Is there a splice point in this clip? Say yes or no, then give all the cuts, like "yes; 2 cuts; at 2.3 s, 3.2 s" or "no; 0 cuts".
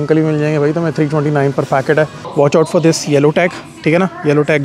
yes; 1 cut; at 2.2 s